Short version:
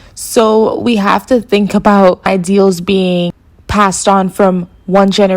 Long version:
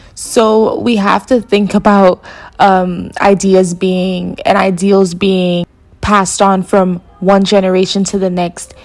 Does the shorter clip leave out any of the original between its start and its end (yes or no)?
yes